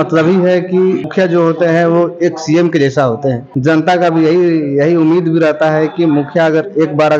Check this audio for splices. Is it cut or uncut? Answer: cut